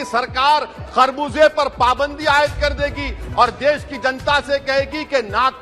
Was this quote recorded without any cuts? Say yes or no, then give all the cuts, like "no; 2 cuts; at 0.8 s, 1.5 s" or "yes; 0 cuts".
yes; 0 cuts